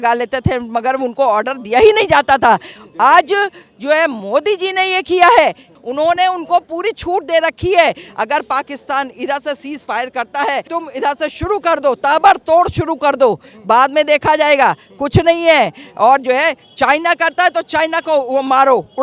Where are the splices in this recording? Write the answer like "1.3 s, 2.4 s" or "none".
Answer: 5.7 s, 10.7 s